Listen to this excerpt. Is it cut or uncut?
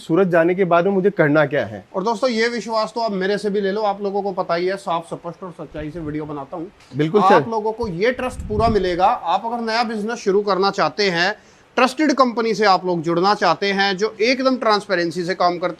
uncut